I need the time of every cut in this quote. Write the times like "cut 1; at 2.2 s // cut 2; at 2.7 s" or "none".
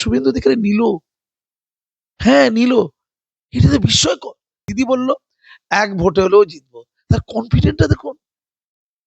cut 1; at 4.6 s